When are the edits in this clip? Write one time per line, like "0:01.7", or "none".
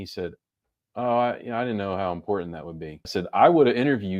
0:03.0